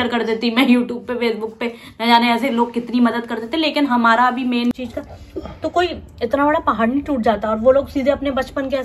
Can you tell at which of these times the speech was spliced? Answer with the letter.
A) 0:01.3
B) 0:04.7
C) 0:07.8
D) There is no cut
B